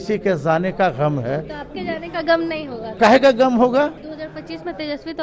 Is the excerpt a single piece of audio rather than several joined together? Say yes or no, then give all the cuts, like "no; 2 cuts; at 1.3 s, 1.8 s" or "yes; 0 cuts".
no; 2 cuts; at 2.9 s, 4.1 s